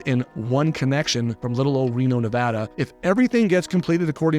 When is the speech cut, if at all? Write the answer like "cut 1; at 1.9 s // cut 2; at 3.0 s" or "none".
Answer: cut 1; at 1.4 s // cut 2; at 2.7 s